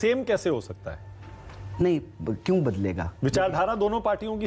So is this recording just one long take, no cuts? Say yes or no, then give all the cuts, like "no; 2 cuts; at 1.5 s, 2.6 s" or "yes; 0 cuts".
yes; 0 cuts